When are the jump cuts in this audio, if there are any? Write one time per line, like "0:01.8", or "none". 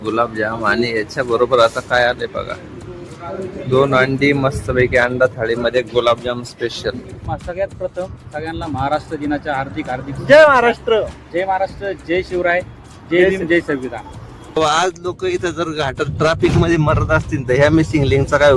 0:07.2
0:14.6